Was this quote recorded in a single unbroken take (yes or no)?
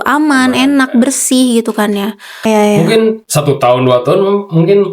no